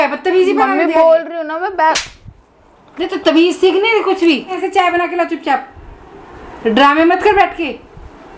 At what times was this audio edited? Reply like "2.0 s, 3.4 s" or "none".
4.6 s

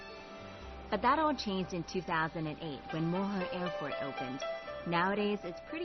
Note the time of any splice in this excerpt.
3.8 s

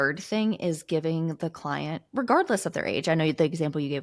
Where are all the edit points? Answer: none

